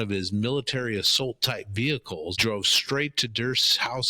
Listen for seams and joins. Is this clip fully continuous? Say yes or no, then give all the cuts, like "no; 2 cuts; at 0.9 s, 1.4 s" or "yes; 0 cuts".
no; 1 cut; at 2.4 s